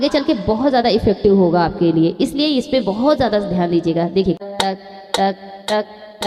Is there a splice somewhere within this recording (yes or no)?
yes